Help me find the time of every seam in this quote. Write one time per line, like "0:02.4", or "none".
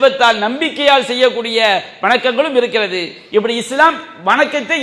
none